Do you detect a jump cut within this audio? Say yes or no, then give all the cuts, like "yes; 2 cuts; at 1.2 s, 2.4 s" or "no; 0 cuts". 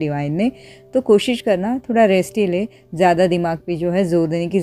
no; 0 cuts